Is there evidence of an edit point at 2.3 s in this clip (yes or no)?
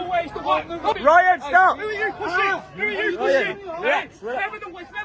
no